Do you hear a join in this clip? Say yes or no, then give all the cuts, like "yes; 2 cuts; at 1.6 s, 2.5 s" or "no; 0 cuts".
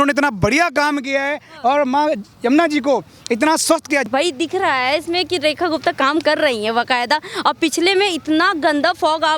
yes; 1 cut; at 4.1 s